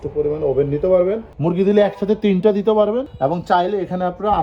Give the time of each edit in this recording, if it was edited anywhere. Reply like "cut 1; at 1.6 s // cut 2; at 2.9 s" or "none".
cut 1; at 1.3 s